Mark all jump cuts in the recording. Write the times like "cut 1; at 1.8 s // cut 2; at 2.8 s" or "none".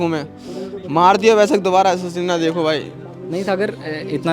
none